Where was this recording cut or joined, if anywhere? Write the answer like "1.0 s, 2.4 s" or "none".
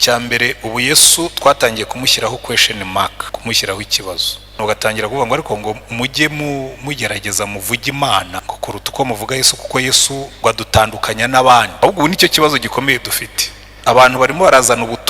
3.2 s, 4.6 s, 8.3 s, 10.3 s, 11.8 s